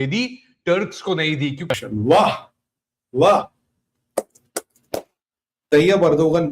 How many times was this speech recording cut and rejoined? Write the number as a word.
one